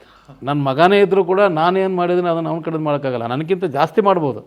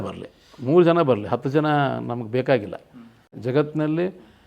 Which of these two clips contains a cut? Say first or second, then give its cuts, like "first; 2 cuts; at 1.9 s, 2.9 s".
second; 1 cut; at 3.3 s